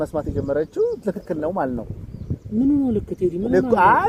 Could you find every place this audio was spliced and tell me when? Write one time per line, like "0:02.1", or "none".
none

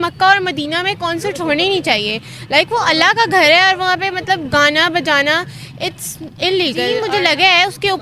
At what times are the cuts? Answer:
0:07.0

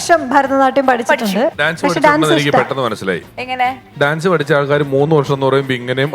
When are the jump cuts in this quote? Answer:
0:01.5

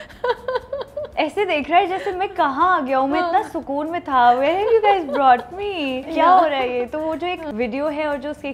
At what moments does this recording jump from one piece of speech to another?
0:01.1
0:06.1
0:07.5

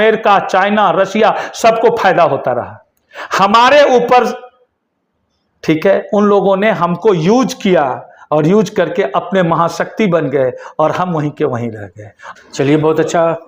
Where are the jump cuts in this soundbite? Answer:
none

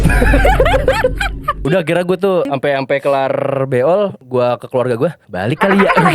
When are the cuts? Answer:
0:01.6
0:02.5
0:04.2
0:05.3

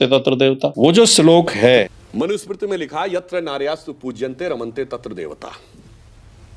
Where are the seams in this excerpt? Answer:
0:02.0

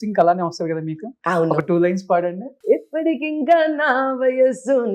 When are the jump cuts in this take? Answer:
0:02.5

